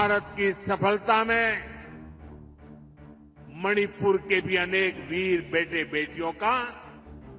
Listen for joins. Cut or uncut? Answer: cut